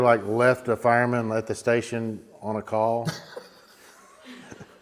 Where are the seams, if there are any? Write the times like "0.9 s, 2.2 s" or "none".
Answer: none